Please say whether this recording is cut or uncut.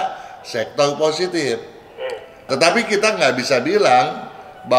uncut